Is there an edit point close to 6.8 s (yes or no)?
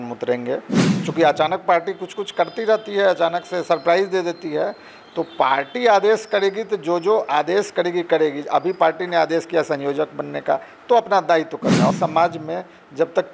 no